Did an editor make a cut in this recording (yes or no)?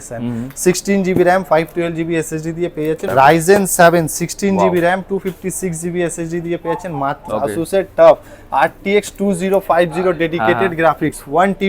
yes